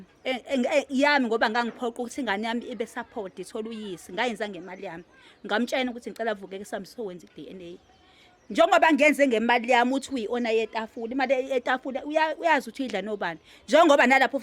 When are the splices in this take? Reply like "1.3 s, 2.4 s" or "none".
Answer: none